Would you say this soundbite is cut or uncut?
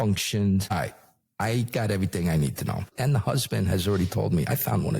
cut